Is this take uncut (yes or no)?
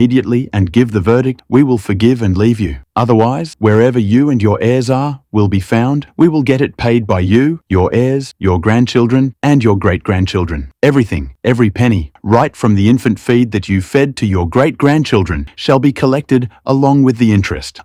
yes